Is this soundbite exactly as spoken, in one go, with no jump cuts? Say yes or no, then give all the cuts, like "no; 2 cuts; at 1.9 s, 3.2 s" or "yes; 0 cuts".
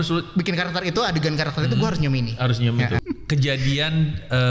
no; 1 cut; at 3.0 s